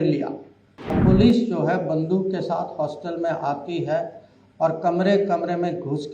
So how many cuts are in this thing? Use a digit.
1